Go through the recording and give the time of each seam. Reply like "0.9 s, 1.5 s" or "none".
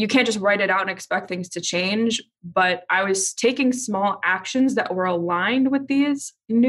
none